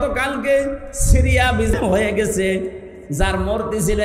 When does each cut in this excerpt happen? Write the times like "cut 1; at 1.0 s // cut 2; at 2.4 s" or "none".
cut 1; at 1.7 s